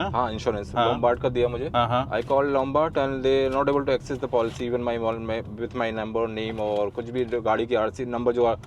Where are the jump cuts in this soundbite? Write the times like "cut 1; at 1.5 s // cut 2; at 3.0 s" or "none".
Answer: cut 1; at 1.6 s